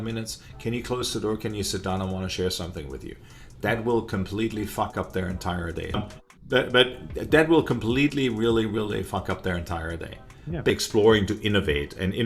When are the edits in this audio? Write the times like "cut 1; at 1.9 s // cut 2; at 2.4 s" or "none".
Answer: cut 1; at 5.9 s // cut 2; at 10.7 s